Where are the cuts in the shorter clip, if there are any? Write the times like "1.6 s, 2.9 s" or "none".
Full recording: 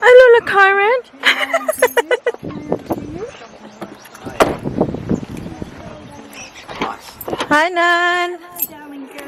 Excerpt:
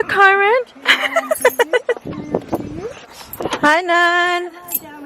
3.2 s